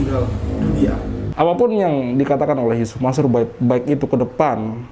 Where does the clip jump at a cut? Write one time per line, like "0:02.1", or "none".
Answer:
0:01.2